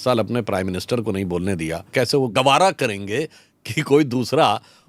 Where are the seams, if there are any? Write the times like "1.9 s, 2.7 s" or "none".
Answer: 2.3 s